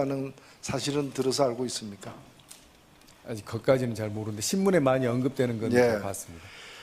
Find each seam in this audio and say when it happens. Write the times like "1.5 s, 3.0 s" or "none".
4.7 s

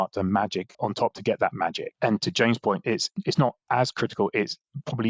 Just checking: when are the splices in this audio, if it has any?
0.8 s, 1.9 s, 3.1 s

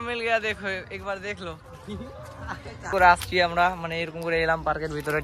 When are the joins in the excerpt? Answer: 3.0 s

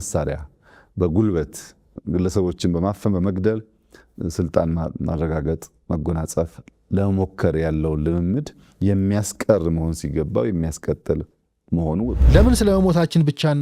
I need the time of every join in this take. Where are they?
12.2 s

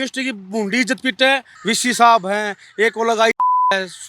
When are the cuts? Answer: 1.5 s

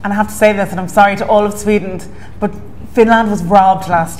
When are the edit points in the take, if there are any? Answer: none

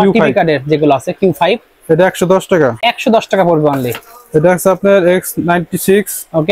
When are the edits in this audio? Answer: none

